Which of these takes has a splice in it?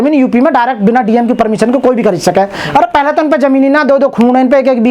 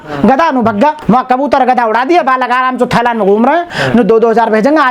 second; 2 cuts; at 1.0 s, 3.8 s

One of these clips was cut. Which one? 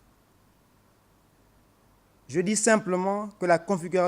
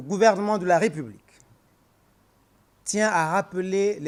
first; 1 cut; at 1.8 s

